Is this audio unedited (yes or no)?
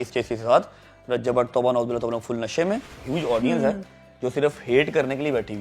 no